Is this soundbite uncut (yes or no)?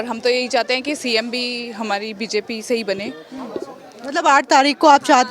yes